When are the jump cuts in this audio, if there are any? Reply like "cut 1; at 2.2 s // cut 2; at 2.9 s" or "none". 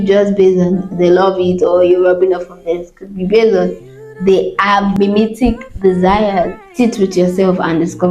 cut 1; at 5.0 s // cut 2; at 6.6 s